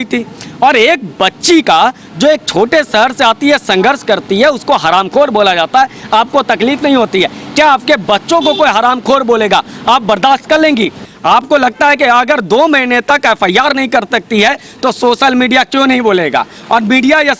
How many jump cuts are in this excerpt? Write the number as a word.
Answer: one